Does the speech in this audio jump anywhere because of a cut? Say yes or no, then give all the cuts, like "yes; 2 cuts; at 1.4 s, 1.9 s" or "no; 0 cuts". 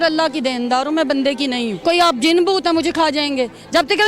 yes; 1 cut; at 1.8 s